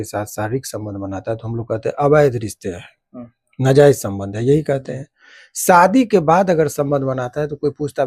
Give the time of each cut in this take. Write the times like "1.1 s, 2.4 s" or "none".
none